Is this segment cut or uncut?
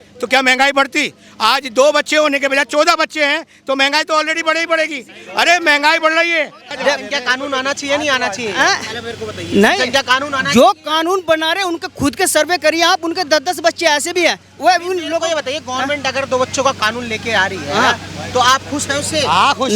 cut